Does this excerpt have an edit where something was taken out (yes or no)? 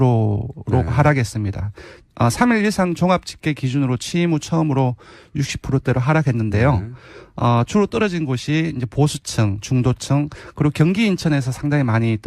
yes